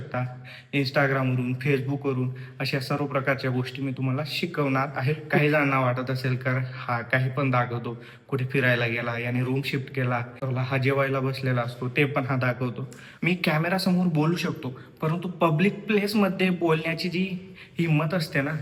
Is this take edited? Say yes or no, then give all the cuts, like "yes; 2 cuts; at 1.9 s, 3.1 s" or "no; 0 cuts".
yes; 3 cuts; at 5.4 s, 10.4 s, 13.0 s